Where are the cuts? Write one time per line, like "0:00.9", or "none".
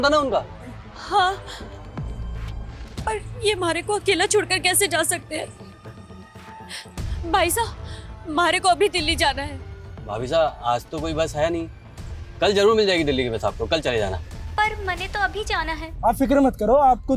none